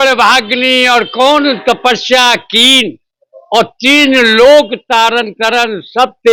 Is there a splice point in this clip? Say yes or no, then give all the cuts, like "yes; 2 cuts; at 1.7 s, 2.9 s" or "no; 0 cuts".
no; 0 cuts